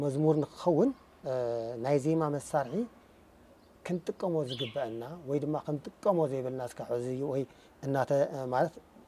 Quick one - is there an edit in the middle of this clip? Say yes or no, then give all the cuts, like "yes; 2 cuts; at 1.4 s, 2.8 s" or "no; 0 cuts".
no; 0 cuts